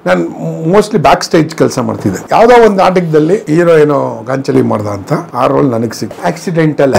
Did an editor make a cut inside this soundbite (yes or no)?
yes